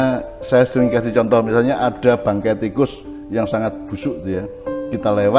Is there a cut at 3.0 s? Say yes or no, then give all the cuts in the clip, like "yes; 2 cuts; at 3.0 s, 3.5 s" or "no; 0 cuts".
no; 0 cuts